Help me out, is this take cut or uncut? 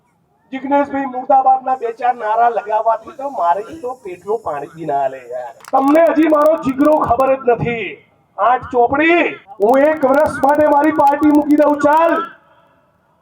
cut